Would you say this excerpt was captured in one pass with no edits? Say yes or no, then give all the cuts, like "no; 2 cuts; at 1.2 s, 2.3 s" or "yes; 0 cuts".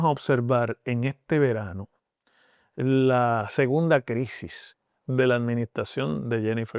yes; 0 cuts